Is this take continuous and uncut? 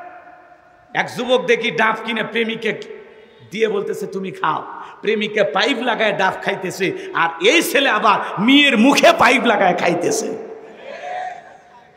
yes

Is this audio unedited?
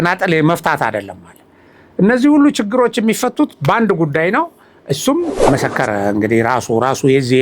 no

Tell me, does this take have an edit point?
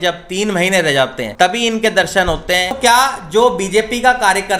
yes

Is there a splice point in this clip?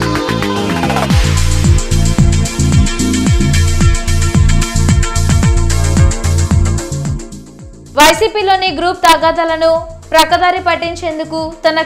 yes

